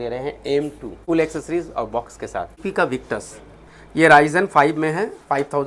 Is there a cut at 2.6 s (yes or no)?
yes